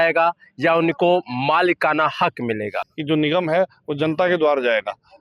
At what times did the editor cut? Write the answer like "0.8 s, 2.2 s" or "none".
2.9 s